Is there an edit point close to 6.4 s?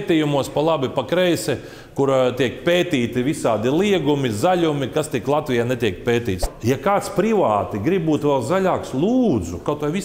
yes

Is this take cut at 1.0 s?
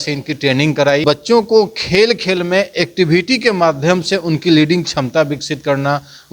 yes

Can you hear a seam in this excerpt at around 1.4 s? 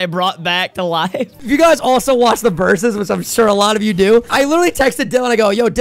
yes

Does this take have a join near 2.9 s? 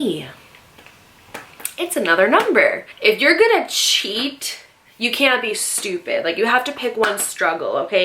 yes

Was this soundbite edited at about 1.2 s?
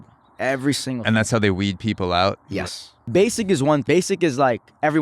no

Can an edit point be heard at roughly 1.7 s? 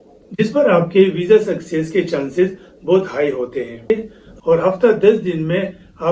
no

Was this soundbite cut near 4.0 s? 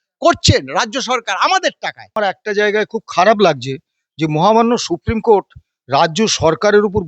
no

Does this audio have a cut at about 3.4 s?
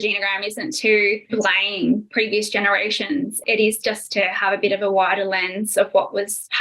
yes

